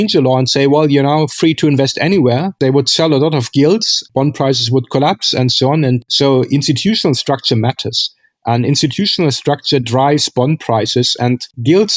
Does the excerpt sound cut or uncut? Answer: cut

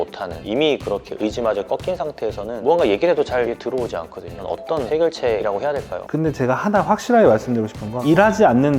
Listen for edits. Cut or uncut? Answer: cut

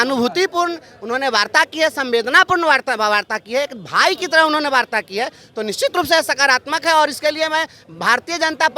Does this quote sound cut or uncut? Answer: uncut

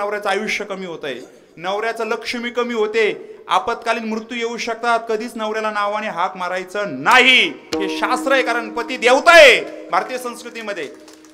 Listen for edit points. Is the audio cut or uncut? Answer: uncut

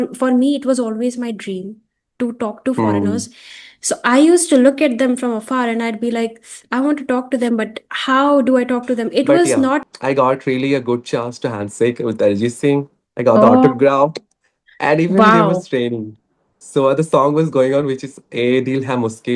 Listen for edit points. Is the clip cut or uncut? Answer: cut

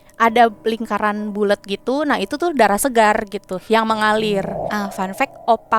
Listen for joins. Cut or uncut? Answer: cut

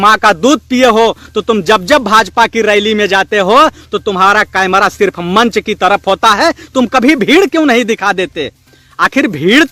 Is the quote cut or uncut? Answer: uncut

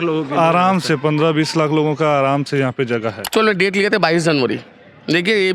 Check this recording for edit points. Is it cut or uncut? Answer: cut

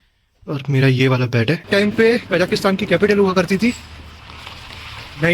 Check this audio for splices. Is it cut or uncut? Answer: cut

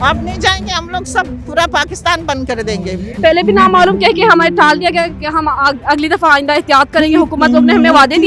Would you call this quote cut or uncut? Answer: cut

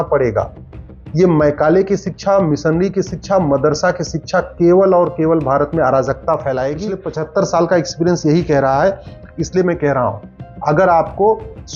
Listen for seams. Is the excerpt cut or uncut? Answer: cut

